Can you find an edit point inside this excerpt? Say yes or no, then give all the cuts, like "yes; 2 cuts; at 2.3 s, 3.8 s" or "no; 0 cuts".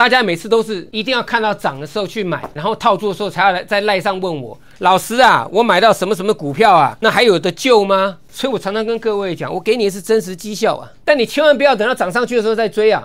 yes; 5 cuts; at 0.9 s, 2.5 s, 7.0 s, 8.2 s, 10.9 s